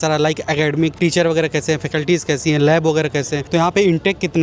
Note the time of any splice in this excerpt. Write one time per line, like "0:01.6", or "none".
0:00.9
0:03.4